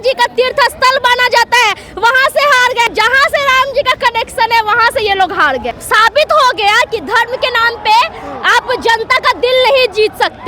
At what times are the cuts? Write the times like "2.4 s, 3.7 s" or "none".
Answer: 2.9 s, 5.8 s